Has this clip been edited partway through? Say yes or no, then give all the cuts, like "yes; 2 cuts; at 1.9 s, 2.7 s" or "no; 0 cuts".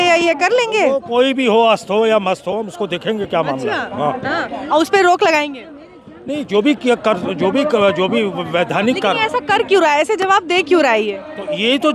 no; 0 cuts